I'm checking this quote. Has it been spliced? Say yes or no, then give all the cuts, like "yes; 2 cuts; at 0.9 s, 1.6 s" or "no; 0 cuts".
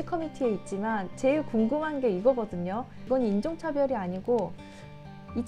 no; 0 cuts